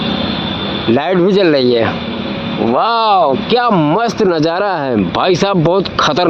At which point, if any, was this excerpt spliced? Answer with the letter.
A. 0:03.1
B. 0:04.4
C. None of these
C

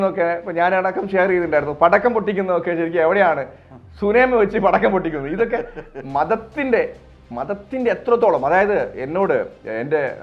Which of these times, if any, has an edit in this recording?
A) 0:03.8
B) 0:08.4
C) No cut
C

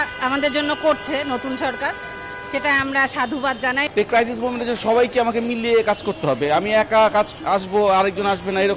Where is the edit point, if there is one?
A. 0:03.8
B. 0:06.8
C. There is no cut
A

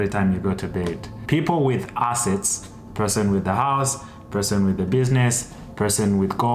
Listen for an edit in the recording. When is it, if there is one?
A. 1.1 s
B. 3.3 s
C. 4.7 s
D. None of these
A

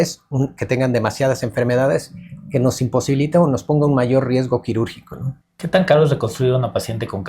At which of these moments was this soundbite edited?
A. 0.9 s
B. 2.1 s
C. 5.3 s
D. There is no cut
D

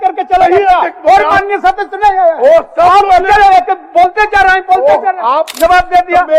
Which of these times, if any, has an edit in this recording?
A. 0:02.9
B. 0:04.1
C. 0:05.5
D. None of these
C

